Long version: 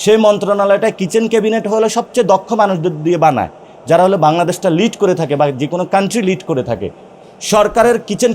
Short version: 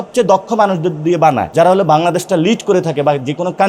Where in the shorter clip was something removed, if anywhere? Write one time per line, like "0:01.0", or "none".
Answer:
0:01.4